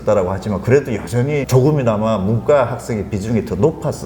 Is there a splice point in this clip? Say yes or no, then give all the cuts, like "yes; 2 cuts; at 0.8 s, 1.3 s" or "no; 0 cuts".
yes; 1 cut; at 1.5 s